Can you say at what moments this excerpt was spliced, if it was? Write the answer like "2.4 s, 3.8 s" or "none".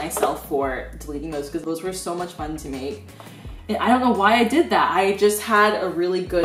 none